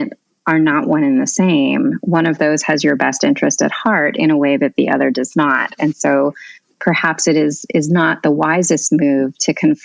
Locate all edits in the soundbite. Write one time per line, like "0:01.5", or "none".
none

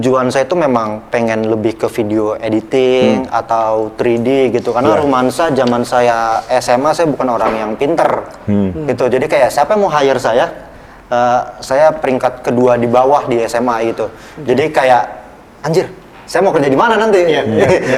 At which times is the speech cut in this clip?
none

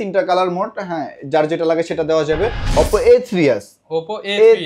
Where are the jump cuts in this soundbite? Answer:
0:02.7

